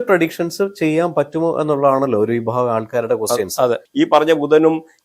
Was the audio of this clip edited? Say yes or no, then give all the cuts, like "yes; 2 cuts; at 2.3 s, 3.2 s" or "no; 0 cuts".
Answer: yes; 1 cut; at 3.8 s